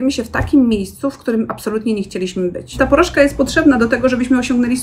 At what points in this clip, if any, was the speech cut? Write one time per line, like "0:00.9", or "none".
0:02.8